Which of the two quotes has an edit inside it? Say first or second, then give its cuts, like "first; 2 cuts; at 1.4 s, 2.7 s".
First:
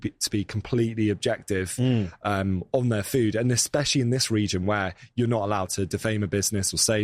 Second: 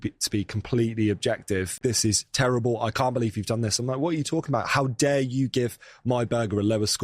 second; 1 cut; at 1.7 s